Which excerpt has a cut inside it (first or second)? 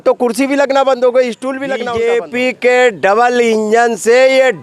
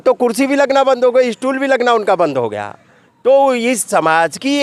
first